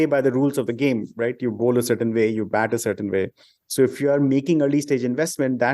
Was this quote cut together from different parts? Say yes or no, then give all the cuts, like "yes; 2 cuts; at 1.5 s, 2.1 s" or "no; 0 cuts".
no; 0 cuts